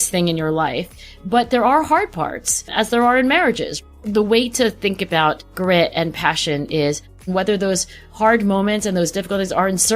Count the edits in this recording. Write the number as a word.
three